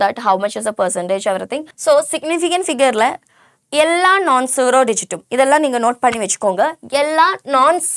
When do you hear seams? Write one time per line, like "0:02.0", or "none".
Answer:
0:01.6